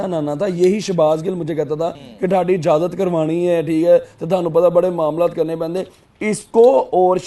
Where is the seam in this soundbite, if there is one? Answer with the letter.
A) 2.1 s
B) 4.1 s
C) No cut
A